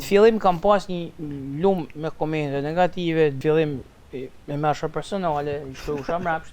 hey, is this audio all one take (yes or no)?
no